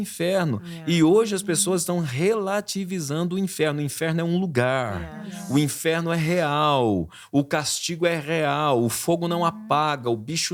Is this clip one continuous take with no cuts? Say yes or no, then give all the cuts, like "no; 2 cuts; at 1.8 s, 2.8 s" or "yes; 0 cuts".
yes; 0 cuts